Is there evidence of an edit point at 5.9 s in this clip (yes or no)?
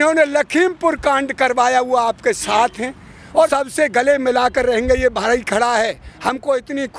no